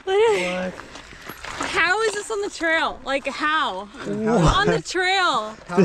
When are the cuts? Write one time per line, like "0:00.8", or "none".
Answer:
none